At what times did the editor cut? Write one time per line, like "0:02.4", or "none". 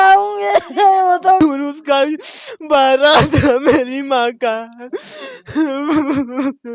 0:01.4

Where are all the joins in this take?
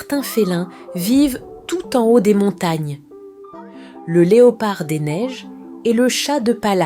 none

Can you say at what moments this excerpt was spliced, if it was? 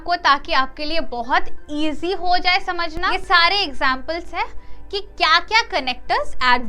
0:03.1

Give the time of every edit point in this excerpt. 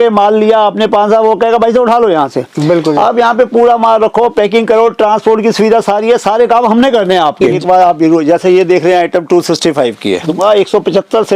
0:07.4
0:10.3

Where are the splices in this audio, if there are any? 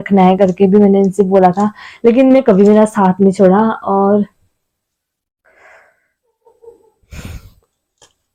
none

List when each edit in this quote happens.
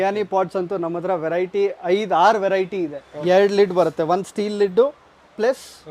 0:03.1

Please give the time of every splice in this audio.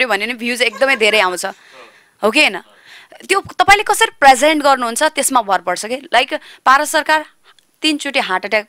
none

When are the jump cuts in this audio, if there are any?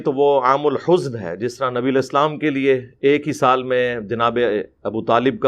none

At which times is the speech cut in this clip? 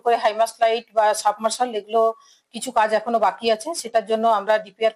none

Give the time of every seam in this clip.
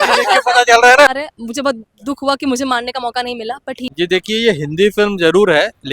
0:01.3
0:03.9

